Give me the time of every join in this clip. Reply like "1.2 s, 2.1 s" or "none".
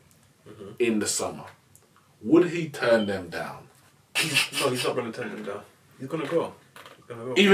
4.3 s